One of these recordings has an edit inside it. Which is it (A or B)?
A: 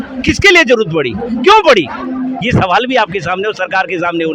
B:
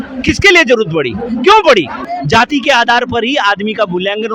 B